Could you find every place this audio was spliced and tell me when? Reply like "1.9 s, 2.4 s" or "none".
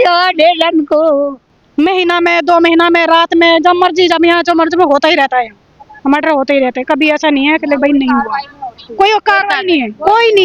1.4 s